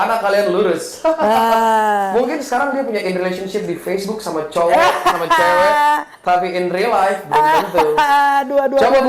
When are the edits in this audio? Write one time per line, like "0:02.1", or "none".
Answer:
none